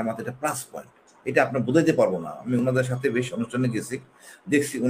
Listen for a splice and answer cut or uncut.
uncut